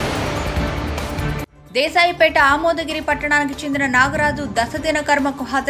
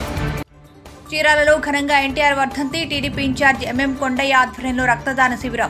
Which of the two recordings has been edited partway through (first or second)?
first